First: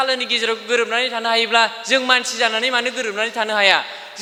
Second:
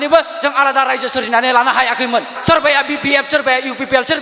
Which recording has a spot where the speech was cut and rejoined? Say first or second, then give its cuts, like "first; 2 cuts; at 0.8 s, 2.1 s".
second; 1 cut; at 2.3 s